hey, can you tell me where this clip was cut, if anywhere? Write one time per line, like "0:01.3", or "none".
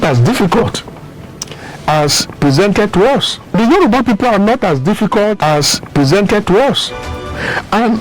0:03.4
0:05.4
0:07.3

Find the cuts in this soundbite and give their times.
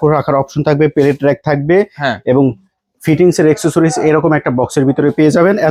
none

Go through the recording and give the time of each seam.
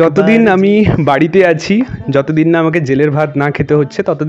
none

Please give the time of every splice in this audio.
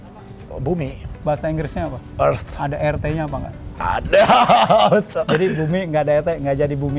none

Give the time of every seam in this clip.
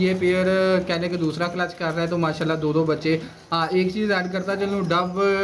none

